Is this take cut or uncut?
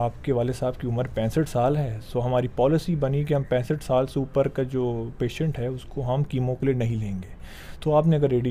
uncut